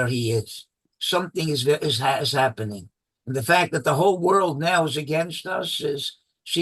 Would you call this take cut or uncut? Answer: cut